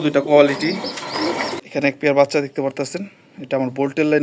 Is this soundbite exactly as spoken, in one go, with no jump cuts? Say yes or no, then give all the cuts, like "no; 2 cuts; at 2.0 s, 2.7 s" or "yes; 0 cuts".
no; 1 cut; at 1.6 s